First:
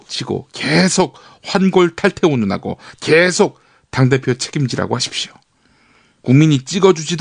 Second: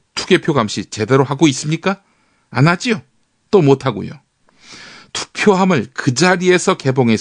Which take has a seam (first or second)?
second